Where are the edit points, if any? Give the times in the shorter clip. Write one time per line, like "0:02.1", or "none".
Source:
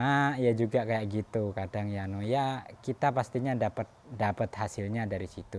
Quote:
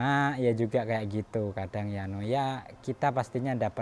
none

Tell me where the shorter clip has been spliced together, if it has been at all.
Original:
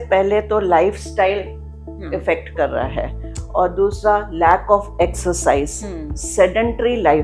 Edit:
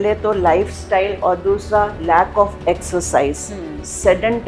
0:01.2

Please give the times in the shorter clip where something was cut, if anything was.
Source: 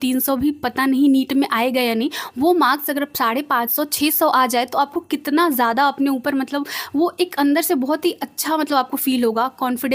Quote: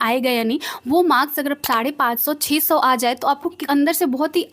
0:03.6

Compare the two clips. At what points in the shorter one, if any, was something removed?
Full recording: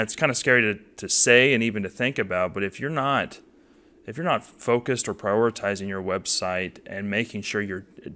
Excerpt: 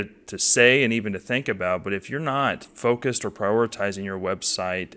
0:02.7

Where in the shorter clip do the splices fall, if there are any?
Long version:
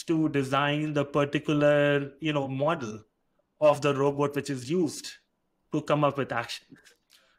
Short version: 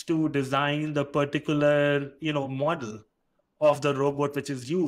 none

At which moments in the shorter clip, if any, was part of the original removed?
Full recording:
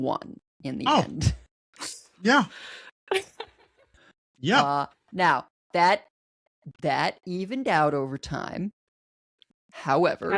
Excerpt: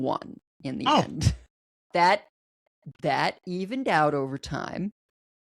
0:01.8

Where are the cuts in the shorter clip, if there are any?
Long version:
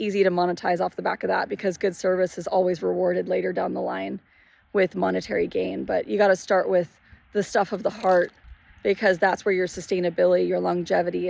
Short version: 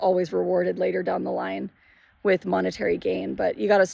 none

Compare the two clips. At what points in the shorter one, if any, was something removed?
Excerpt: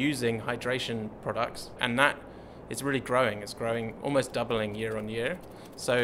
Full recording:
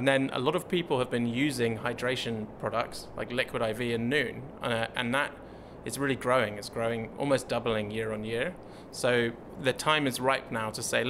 0:01.8

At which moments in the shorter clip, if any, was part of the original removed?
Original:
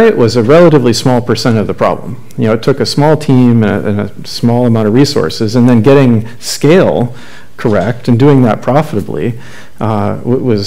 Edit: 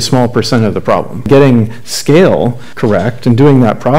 0:01.3
0:02.7

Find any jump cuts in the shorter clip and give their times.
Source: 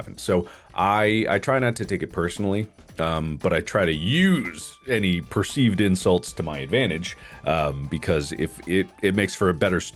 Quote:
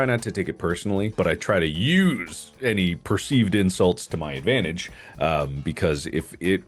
0:01.1

